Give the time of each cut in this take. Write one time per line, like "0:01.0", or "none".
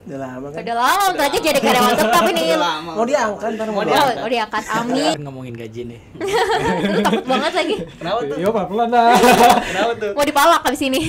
0:05.1